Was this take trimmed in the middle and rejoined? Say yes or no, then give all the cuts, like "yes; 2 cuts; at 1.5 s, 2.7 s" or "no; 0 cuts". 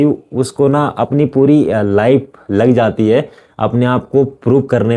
no; 0 cuts